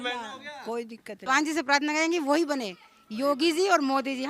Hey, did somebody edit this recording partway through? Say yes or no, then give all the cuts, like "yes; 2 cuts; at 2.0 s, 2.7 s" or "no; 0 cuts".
yes; 1 cut; at 1.2 s